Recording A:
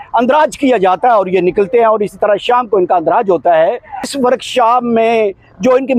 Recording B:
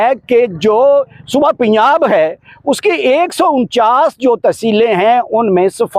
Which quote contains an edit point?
A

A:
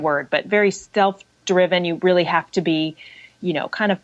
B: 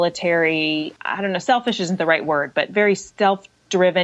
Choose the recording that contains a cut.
B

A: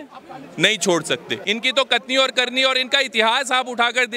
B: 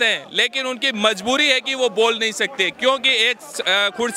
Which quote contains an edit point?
A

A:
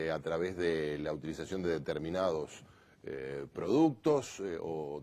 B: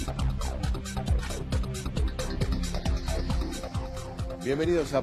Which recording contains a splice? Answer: A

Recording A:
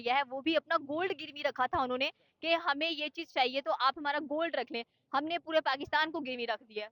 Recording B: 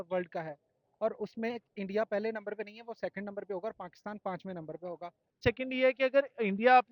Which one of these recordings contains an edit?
B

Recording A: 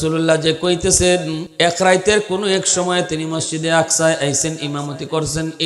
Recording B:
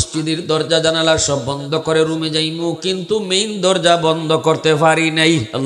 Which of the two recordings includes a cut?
A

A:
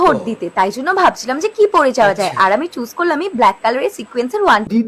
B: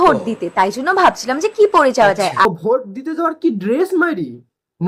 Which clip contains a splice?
B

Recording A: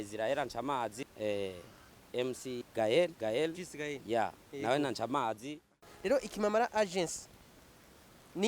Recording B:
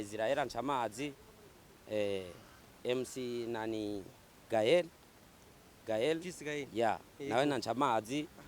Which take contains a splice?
A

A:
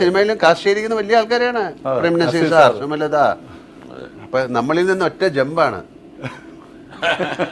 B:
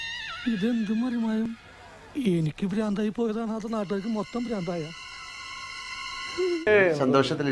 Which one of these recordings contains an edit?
B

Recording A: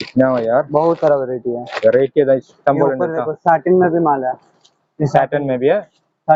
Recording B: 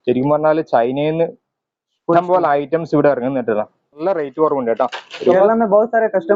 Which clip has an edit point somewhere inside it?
B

